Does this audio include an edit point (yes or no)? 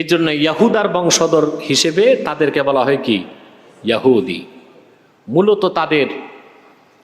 no